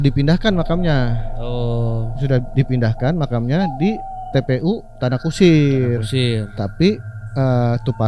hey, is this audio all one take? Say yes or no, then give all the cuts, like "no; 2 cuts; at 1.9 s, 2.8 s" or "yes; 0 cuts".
yes; 0 cuts